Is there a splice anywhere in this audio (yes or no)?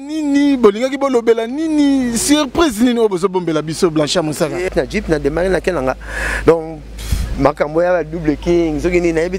yes